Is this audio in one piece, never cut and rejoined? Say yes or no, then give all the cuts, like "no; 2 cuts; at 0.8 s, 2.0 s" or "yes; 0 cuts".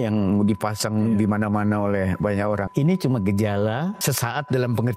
no; 2 cuts; at 2.7 s, 4.0 s